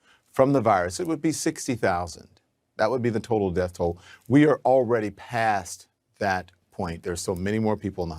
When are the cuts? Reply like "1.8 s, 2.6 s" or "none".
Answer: 2.8 s